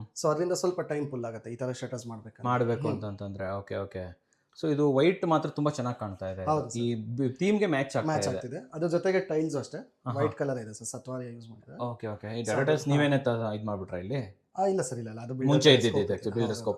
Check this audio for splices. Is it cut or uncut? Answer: uncut